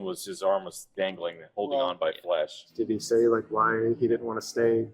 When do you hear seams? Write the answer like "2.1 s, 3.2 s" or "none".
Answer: 2.6 s